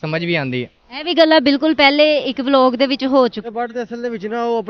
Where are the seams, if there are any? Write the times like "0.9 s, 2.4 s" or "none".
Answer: 3.4 s